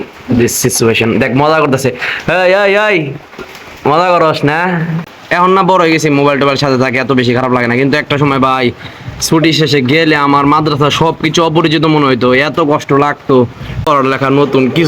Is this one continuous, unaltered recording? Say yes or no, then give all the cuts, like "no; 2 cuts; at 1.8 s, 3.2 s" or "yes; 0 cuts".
no; 2 cuts; at 4.6 s, 13.9 s